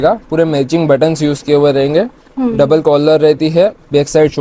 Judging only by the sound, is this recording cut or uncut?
uncut